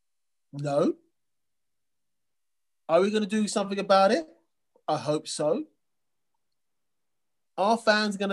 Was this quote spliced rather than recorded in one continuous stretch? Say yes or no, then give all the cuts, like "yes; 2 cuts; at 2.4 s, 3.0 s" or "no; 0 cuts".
no; 0 cuts